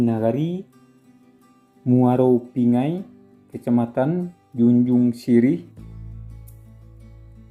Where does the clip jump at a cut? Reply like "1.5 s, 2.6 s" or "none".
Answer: none